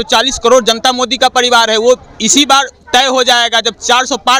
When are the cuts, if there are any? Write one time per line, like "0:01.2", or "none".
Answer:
none